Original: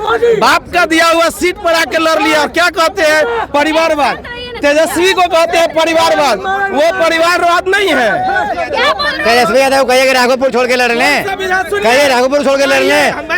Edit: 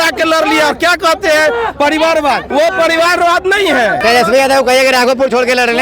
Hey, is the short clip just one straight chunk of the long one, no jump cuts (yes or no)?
no